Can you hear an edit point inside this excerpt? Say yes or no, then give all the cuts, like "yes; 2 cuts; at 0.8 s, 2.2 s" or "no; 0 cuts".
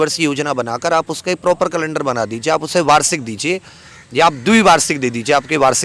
no; 0 cuts